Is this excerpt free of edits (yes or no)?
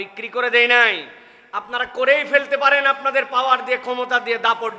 yes